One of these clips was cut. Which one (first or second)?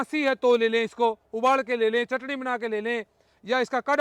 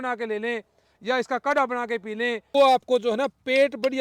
second